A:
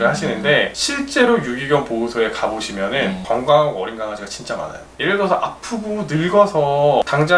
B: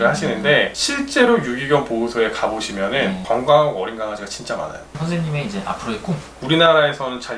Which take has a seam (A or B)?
B